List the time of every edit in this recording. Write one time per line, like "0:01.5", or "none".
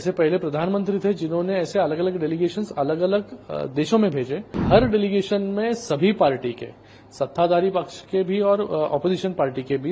0:04.5